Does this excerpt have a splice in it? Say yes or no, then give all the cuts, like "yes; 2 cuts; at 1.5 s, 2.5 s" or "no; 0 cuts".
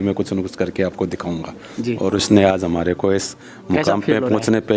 no; 0 cuts